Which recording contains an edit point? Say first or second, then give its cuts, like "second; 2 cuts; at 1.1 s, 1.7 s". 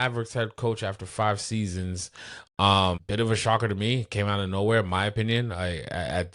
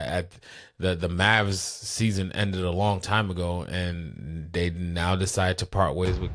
first; 1 cut; at 3.0 s